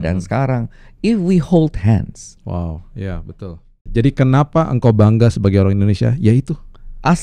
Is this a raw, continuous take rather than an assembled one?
no; 1 cut; at 3.8 s

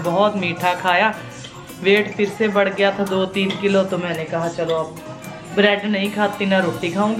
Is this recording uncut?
yes; 0 cuts

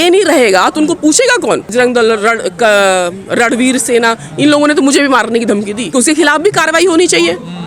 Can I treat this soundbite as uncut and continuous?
no; 2 cuts; at 1.7 s, 5.9 s

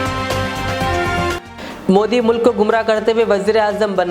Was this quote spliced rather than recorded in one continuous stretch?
yes; 1 cut; at 1.3 s

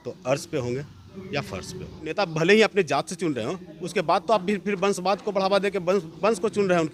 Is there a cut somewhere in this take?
yes; 1 cut; at 2.1 s

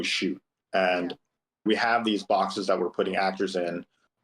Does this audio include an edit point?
yes; 1 cut; at 1.6 s

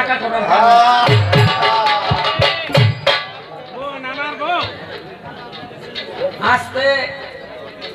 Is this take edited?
no; 0 cuts

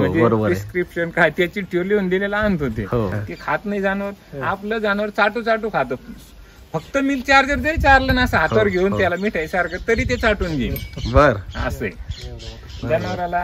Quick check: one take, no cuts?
no; 1 cut; at 3.2 s

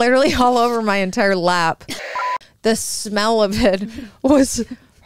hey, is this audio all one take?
no; 1 cut; at 2.3 s

